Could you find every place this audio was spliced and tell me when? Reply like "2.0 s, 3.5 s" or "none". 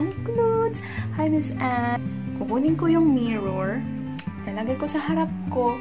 2.0 s